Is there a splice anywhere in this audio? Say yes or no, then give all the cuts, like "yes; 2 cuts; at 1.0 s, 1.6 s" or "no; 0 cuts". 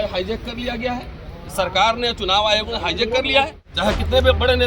yes; 1 cut; at 3.6 s